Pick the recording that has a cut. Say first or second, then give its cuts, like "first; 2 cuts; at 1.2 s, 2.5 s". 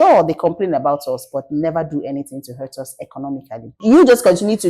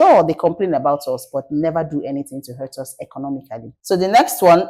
first; 1 cut; at 3.8 s